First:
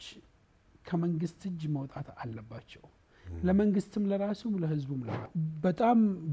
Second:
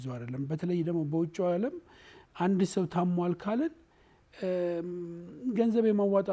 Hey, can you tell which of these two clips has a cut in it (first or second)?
first